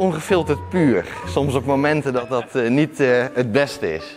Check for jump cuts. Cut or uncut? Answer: uncut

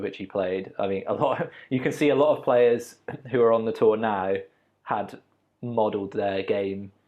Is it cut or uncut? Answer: uncut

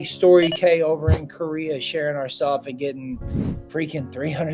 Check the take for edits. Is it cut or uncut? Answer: uncut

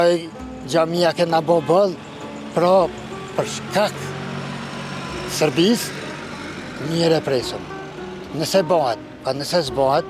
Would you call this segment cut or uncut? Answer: uncut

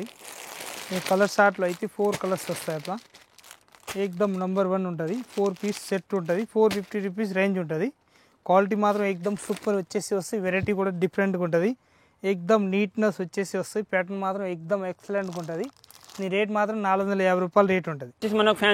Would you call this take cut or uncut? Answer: uncut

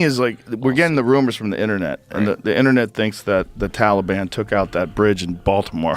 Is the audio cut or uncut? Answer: uncut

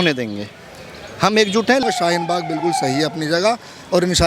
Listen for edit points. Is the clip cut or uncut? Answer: cut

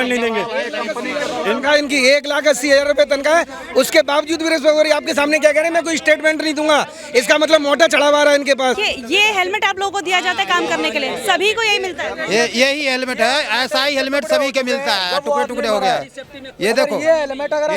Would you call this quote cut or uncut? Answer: cut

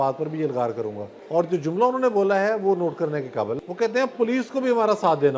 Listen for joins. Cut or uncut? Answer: cut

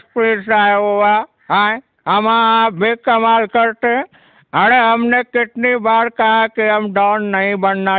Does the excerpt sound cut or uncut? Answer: uncut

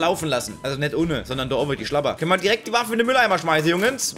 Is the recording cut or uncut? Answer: cut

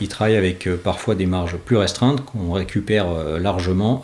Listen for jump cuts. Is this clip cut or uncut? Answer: uncut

